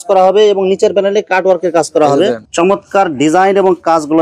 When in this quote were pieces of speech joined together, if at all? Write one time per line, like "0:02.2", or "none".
0:02.5